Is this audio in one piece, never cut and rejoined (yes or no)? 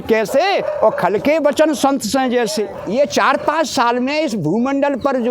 no